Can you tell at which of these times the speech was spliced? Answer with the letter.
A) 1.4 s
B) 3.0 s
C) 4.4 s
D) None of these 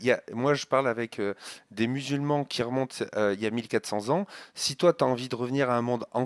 D